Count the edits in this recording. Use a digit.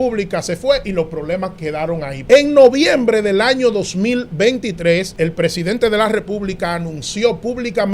2